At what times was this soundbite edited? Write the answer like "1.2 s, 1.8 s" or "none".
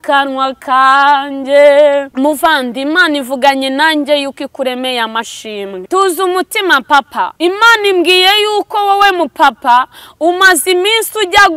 2.1 s, 5.8 s, 7.3 s